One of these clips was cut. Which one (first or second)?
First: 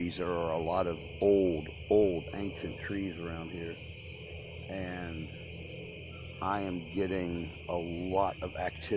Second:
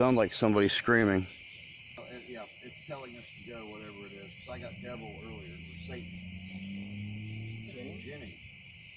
second